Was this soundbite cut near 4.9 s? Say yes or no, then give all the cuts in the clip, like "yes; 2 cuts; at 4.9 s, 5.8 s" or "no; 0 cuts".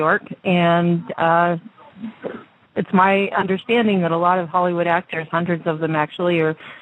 yes; 1 cut; at 4.9 s